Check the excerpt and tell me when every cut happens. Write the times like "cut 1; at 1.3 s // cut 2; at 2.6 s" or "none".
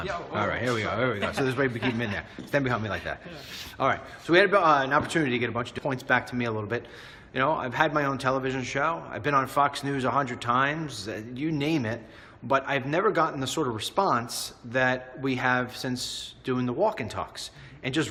none